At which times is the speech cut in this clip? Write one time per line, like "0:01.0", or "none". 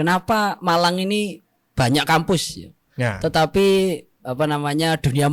none